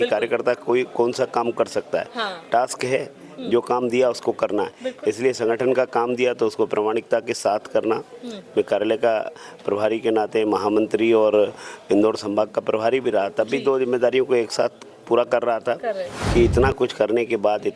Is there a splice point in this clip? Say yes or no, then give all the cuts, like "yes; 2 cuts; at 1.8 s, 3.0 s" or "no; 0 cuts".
yes; 1 cut; at 16.1 s